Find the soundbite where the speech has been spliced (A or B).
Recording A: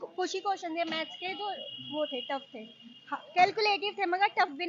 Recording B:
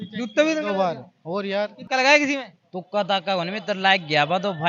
B